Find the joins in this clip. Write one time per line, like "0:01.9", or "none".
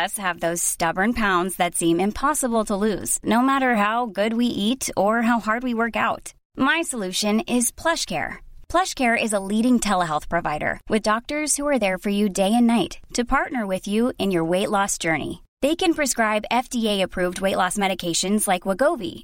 none